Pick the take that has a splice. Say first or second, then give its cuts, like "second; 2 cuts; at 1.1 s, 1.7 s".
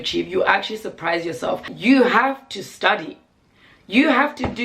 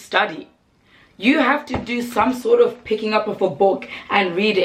first; 1 cut; at 1.8 s